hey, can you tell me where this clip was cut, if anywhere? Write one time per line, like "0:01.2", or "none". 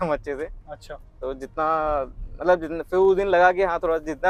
none